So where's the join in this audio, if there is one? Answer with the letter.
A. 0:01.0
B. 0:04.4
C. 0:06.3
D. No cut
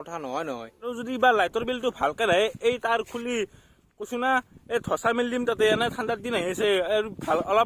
A